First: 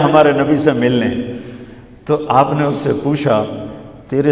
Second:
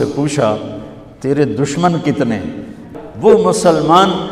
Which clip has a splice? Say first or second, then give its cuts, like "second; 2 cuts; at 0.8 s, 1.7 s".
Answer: second; 1 cut; at 3.3 s